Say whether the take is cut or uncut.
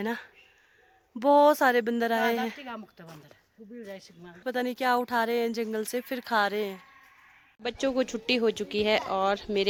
uncut